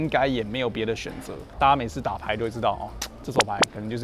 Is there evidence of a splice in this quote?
no; 0 cuts

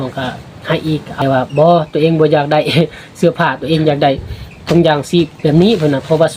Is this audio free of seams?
no; 1 cut; at 1.1 s

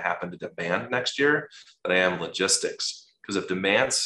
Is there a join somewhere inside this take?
no; 0 cuts

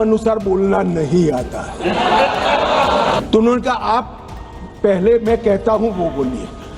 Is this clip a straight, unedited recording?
no; 1 cut; at 3.2 s

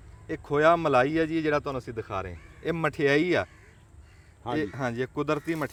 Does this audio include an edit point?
no; 0 cuts

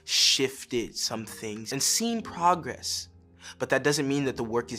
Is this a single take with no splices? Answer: no; 1 cut; at 1.7 s

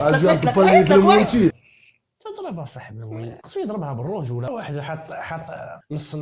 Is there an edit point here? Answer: yes; 1 cut; at 4.5 s

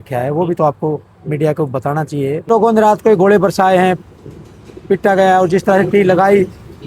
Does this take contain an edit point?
yes; 1 cut; at 2.5 s

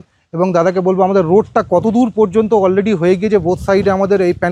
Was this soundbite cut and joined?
no; 0 cuts

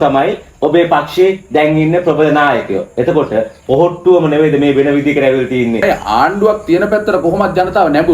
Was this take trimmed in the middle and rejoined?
yes; 1 cut; at 5.8 s

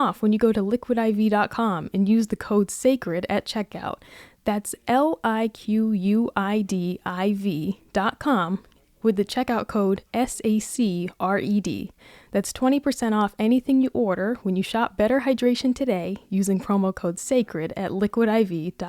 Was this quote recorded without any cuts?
yes; 0 cuts

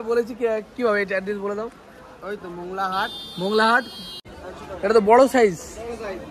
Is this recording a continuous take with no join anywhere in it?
no; 1 cut; at 4.4 s

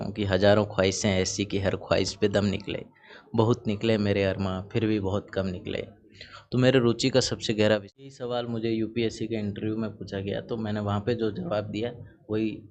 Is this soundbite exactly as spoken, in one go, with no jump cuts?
no; 1 cut; at 8.1 s

